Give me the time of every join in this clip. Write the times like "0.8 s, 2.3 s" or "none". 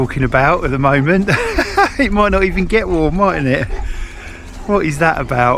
none

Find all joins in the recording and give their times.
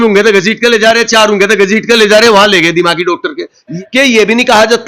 3.7 s

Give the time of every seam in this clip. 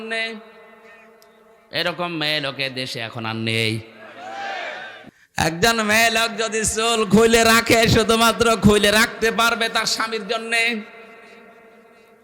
5.0 s

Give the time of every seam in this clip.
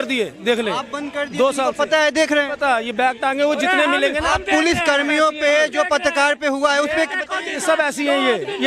none

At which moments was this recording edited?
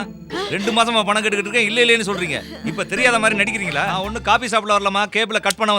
3.9 s

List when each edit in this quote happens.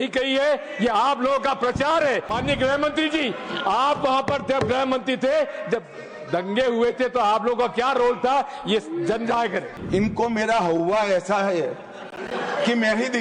2.3 s, 9.7 s

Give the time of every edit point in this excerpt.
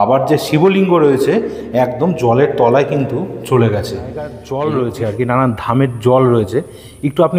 4.4 s

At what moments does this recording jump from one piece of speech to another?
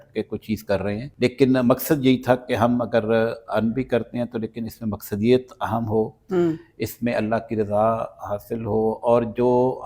1.1 s

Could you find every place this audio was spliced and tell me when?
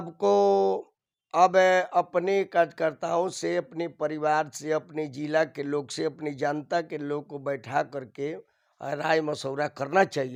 none

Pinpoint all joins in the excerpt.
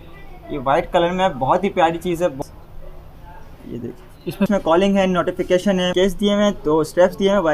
2.4 s, 4.5 s, 5.9 s

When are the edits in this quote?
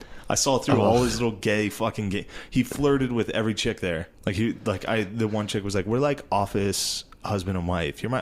4.1 s

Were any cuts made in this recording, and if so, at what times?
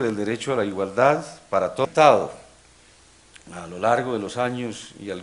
none

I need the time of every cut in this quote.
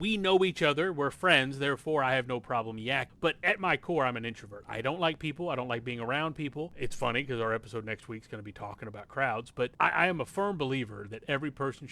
3.1 s, 6.7 s, 9.7 s

